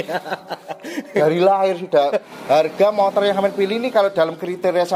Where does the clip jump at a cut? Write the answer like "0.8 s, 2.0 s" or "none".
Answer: 2.3 s